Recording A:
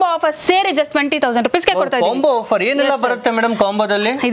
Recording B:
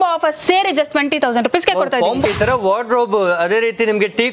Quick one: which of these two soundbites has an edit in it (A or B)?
B